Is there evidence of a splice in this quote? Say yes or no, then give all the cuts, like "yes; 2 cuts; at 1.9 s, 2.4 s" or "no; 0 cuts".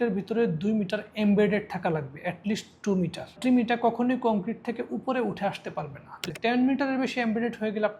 yes; 1 cut; at 6.2 s